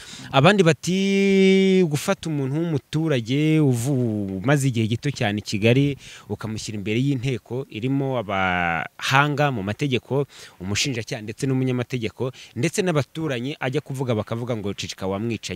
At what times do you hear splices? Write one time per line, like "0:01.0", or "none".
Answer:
none